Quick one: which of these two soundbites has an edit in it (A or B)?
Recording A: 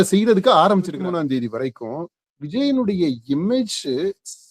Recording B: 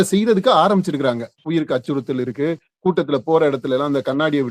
A